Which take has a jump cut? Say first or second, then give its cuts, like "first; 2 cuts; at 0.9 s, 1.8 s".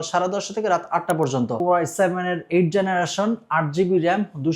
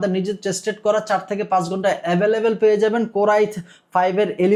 first; 1 cut; at 1.6 s